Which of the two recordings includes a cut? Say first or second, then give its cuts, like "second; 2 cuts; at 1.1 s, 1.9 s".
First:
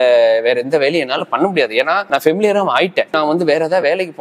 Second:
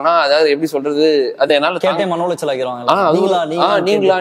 first; 2 cuts; at 2.0 s, 3.1 s